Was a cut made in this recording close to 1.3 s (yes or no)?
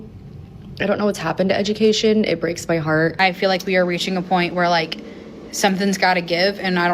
no